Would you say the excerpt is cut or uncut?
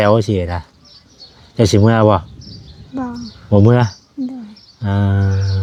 uncut